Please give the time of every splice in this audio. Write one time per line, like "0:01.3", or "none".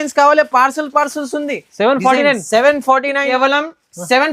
0:03.3

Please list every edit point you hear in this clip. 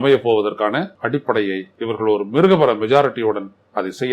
0:00.9
0:01.7

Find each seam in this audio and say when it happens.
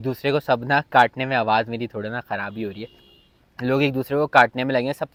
none

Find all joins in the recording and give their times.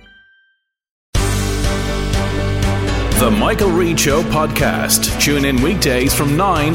0:01.0

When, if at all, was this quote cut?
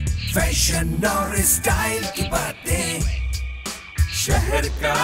0:04.1

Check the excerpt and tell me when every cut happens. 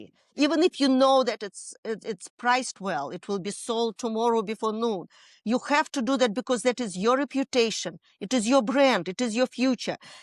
none

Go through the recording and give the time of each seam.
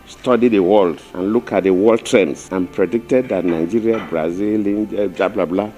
0:01.1
0:02.4

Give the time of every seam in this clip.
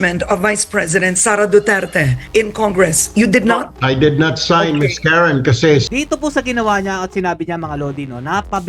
0:05.9

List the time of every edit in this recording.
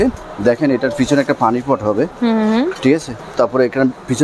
0:03.2

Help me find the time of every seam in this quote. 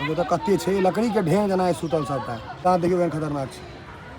0:02.5

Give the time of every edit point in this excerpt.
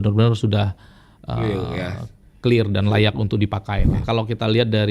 0:04.0

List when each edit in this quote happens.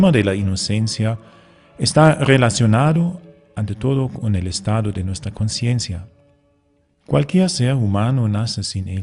0:05.8

